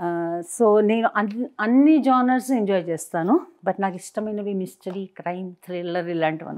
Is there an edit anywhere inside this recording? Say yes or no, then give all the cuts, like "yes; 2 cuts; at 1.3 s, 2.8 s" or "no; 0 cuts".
no; 0 cuts